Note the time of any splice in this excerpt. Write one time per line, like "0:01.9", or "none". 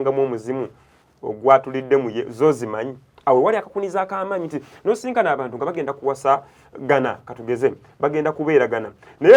none